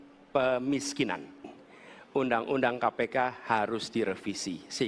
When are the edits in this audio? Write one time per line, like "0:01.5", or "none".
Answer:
0:01.4